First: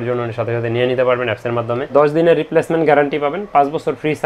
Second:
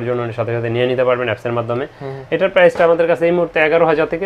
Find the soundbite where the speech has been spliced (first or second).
first